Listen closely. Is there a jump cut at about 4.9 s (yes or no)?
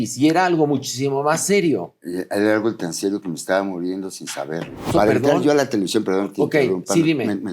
yes